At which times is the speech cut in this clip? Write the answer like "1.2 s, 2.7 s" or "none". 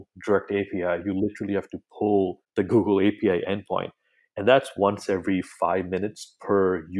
2.4 s